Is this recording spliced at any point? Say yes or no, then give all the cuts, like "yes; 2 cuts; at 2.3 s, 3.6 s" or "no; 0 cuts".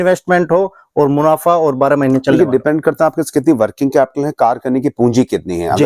no; 0 cuts